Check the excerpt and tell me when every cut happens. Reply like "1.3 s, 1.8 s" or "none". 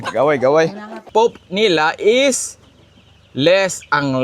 1.1 s

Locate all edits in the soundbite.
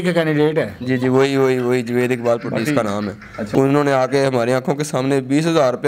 3.4 s

